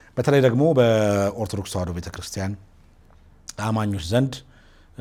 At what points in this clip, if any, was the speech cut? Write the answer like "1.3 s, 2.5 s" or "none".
none